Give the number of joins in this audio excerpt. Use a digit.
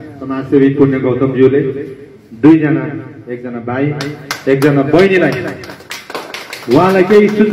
0